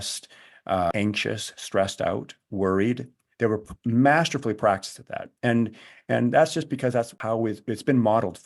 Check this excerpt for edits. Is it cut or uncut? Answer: cut